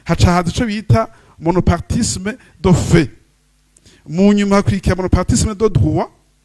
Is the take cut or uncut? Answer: uncut